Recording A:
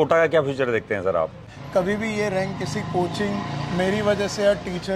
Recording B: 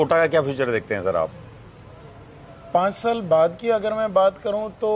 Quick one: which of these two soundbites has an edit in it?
A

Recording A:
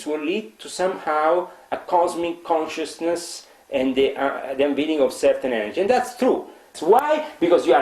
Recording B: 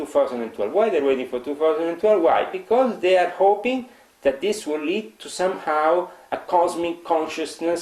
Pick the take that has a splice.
A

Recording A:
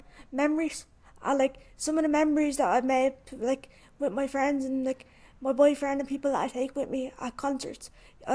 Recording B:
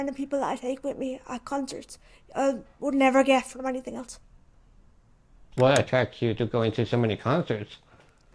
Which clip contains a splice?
B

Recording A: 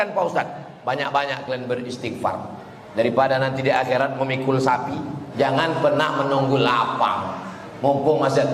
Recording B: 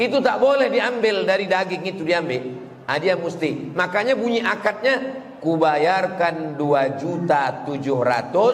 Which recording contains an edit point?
A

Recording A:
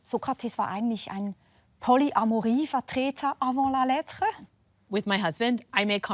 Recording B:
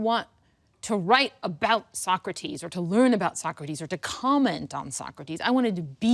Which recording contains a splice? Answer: A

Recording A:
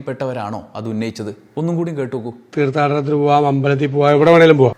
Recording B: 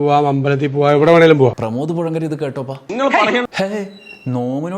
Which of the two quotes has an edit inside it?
B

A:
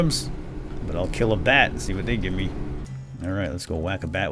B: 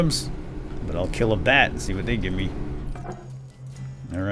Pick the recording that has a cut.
A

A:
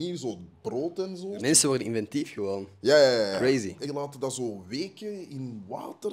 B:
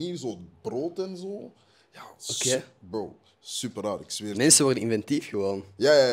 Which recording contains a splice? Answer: A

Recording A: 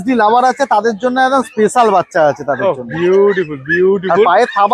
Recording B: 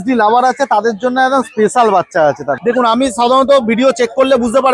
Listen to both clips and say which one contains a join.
B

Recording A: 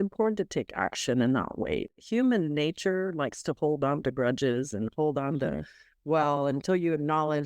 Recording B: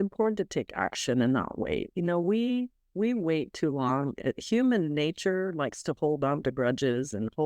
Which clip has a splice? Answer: A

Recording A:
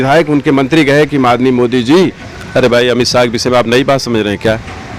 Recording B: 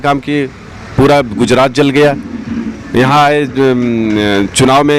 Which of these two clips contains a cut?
A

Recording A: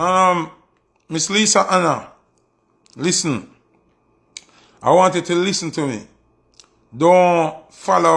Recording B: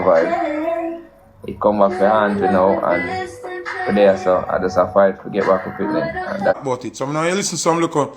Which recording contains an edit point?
B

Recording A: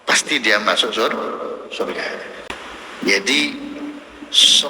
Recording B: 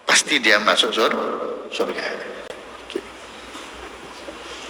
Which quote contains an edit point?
A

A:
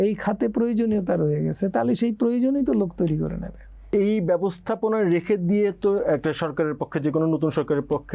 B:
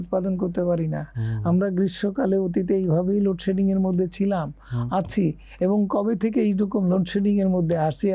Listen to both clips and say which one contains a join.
A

